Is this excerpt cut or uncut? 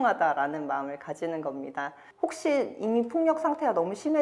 cut